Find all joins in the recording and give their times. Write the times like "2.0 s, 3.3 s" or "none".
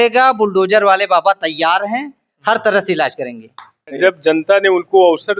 4.0 s